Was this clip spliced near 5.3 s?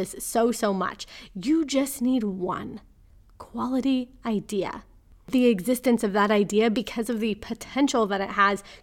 yes; 1 cut; at 5.3 s

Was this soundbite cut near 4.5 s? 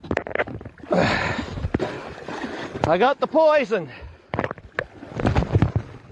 no; 1 cut; at 1.8 s

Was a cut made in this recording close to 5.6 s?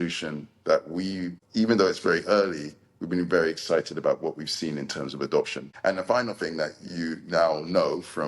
yes; 2 cuts; at 1.4 s, 5.6 s

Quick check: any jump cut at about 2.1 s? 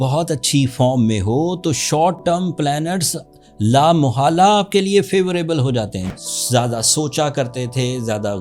no; 1 cut; at 6.1 s

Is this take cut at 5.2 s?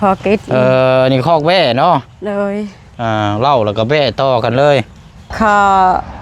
yes; 1 cut; at 5.2 s

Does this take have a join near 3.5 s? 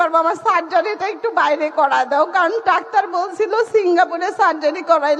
no; 0 cuts

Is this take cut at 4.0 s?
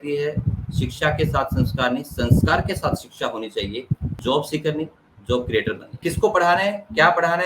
yes; 2 cuts; at 4.0 s, 6.0 s

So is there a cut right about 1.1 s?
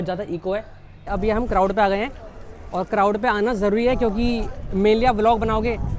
yes; 1 cut; at 1.1 s

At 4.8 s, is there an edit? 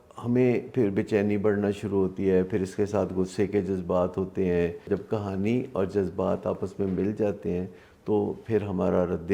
yes; 1 cut; at 4.8 s

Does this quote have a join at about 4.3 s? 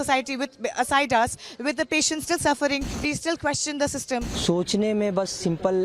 yes; 2 cuts; at 2.9 s, 4.3 s

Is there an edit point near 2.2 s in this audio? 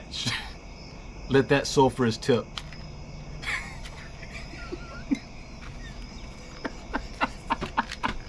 no; 0 cuts

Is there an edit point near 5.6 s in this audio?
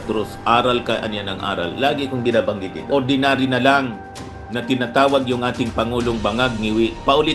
no; 1 cut; at 2.8 s

